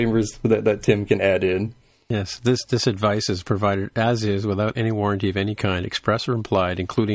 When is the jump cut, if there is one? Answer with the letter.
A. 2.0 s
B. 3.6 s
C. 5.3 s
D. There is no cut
A